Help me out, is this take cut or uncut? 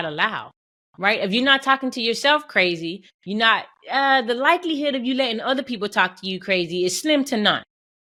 uncut